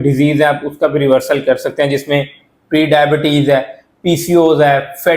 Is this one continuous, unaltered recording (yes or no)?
yes